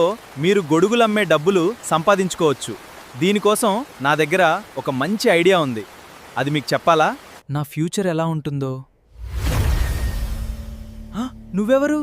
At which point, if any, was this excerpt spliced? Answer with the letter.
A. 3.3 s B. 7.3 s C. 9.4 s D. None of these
B